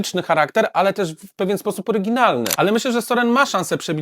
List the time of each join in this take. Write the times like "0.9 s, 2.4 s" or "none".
2.6 s